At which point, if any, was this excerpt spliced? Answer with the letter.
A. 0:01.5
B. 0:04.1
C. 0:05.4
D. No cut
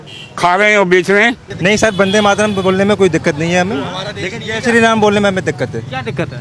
A